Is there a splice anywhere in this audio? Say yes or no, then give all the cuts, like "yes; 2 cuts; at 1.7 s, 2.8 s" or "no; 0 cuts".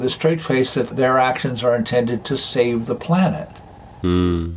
no; 0 cuts